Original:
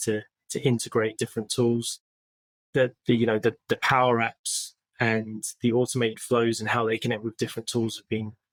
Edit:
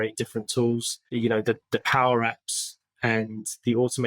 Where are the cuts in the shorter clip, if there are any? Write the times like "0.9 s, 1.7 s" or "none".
1.2 s

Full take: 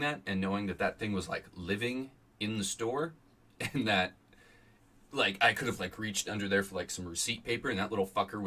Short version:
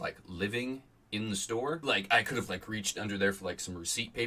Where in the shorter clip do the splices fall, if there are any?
1.4 s

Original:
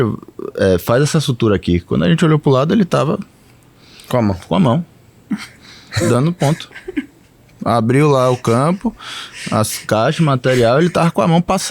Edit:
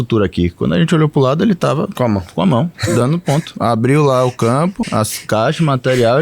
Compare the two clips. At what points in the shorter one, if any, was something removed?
1.9 s, 3.1 s, 4.8 s

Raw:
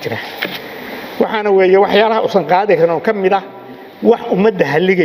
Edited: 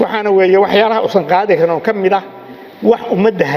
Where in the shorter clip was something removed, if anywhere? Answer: none

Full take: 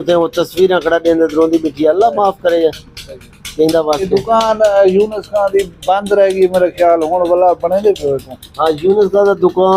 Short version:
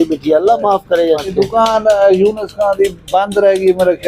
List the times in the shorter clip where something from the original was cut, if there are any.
1.3 s

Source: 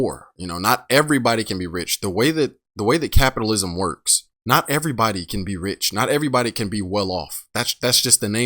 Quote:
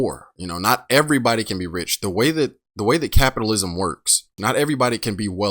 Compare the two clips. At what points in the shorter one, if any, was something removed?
4.3 s

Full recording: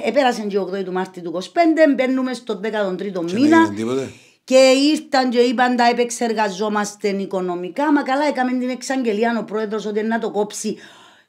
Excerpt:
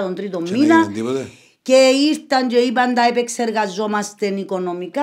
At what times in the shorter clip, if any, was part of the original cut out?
none

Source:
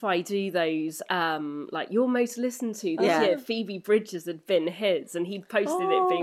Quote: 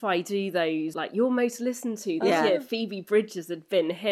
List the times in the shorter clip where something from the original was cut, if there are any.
1.0 s

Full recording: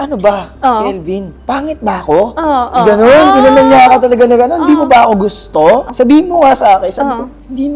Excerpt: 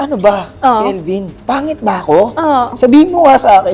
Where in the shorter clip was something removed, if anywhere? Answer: 2.7 s

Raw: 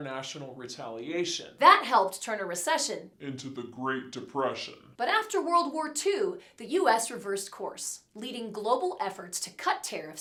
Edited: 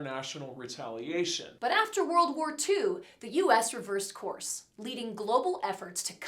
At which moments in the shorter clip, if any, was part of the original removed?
1.4 s

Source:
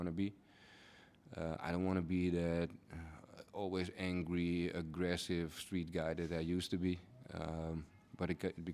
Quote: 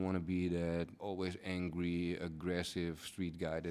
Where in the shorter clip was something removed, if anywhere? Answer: 1.0 s

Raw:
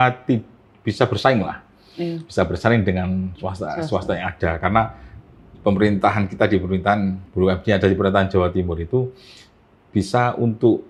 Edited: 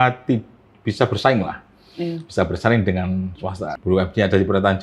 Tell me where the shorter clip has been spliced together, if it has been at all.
3.7 s

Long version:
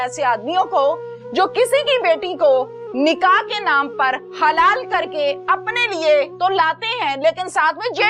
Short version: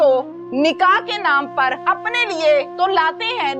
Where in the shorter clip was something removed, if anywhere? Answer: 1.8 s

